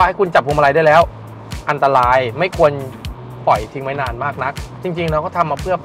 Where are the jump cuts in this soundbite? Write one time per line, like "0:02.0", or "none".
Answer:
none